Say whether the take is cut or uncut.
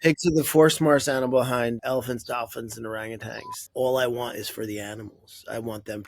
cut